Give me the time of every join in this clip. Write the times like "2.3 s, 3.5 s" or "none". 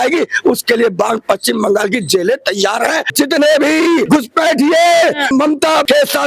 3.1 s, 4.1 s, 5.5 s